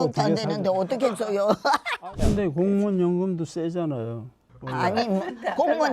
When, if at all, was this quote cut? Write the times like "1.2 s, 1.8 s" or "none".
1.9 s

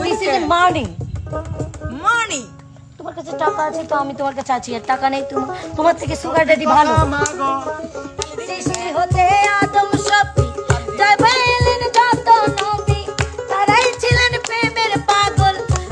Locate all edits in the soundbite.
8.2 s

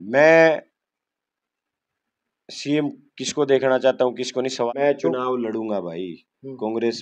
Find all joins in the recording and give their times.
4.7 s

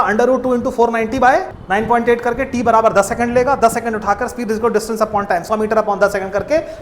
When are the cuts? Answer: 1.6 s

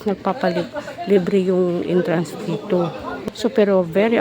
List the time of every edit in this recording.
3.1 s

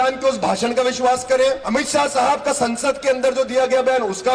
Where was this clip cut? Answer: 1.6 s

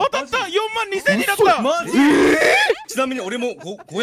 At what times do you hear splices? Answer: 2.9 s

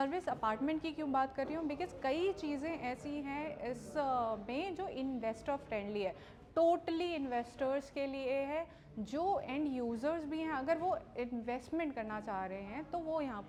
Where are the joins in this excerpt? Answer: none

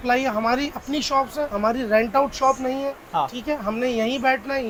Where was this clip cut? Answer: none

